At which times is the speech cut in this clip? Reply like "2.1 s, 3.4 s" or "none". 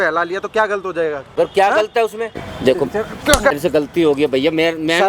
1.2 s, 2.4 s, 3.5 s